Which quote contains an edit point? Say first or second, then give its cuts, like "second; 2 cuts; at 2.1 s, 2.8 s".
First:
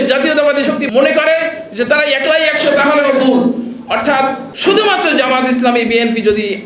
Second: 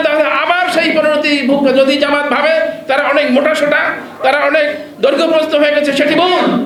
first; 2 cuts; at 0.9 s, 4.5 s